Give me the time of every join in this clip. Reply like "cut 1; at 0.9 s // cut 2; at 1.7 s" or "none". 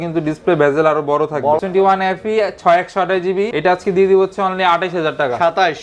cut 1; at 1.6 s // cut 2; at 3.5 s

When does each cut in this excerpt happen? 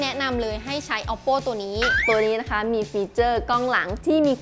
cut 1; at 2.0 s

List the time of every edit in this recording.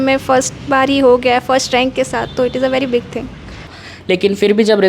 cut 1; at 3.8 s

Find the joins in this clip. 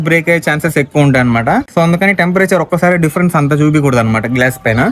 none

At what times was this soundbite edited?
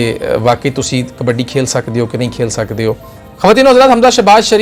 none

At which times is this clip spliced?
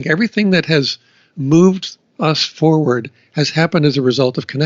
none

